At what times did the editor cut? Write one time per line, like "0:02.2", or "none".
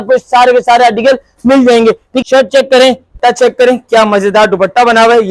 0:02.2
0:03.1